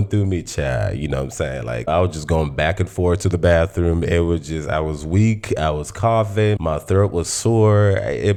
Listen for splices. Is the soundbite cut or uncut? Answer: uncut